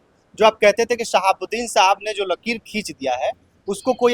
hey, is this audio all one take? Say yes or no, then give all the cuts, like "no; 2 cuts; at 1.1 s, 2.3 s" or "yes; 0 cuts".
yes; 0 cuts